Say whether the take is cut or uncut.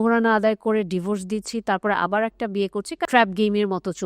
cut